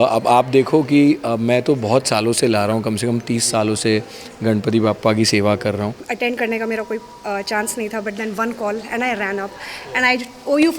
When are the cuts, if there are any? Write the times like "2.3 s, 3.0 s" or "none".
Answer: 6.0 s